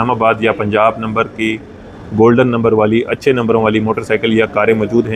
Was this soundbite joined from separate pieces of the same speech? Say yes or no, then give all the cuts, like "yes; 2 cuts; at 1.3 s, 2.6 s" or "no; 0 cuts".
no; 0 cuts